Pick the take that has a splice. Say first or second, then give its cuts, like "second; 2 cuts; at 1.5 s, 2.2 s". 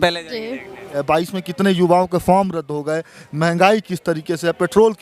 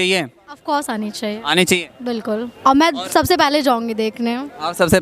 first; 1 cut; at 1.0 s